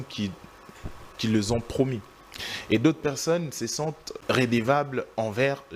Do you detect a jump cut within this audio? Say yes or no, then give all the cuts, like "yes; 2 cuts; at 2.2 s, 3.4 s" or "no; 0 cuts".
yes; 2 cuts; at 2.3 s, 4.2 s